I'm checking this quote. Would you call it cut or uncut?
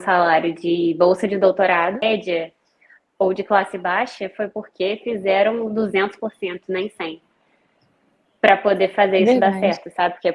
cut